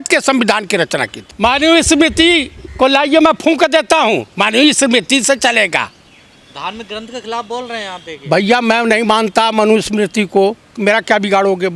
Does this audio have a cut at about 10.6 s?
no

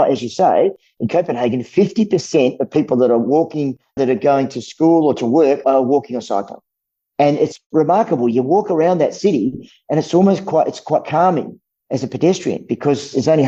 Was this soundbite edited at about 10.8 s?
no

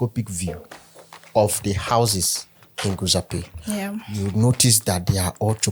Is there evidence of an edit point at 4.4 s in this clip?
no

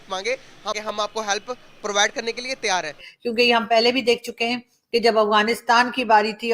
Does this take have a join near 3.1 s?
yes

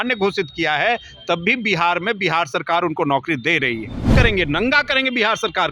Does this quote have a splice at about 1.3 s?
no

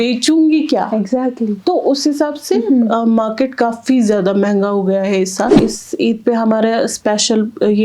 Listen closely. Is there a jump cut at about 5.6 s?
yes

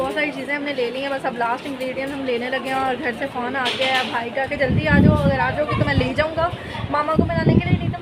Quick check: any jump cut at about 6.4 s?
no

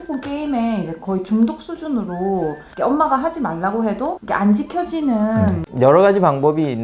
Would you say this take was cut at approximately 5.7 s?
yes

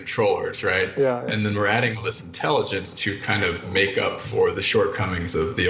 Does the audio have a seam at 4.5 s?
yes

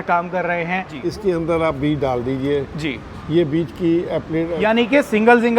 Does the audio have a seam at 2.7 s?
no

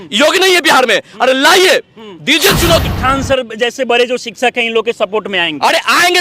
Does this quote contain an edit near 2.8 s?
yes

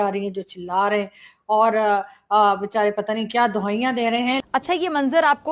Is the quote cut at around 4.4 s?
yes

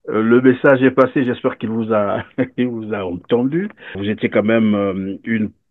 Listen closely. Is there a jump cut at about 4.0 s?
yes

